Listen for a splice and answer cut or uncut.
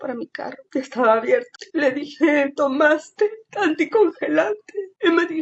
uncut